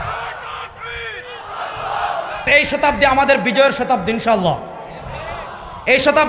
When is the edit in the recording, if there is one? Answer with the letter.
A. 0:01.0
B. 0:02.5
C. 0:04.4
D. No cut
B